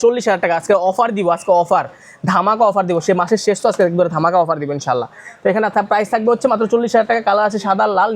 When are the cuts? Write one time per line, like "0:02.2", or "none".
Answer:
none